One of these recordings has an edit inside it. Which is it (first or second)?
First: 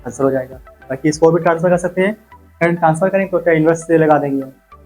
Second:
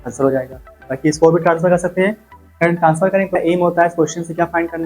second